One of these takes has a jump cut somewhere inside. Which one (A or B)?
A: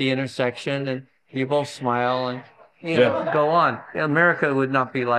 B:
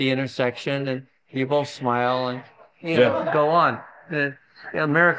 A